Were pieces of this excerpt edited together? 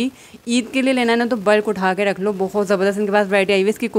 no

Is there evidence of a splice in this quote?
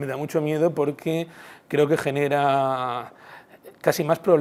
no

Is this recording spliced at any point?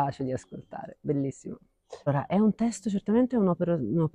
yes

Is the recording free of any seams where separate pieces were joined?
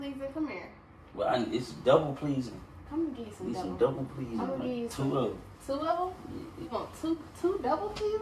yes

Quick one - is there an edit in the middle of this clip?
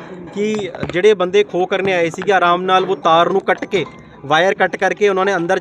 no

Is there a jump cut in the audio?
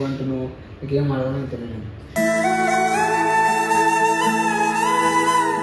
no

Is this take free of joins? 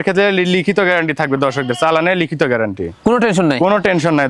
yes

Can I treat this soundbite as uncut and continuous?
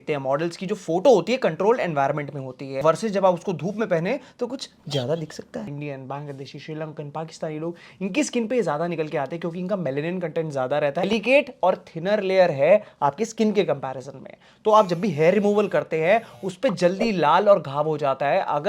no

